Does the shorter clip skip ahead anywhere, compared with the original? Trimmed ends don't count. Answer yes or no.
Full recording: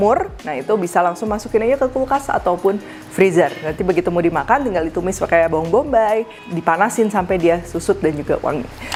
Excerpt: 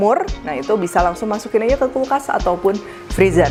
no